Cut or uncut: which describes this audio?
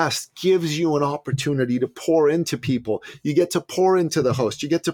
uncut